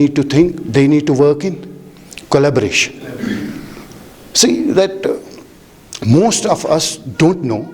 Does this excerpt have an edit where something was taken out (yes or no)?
no